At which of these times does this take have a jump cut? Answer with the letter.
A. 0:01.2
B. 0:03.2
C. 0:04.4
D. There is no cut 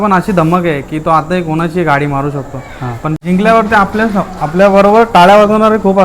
B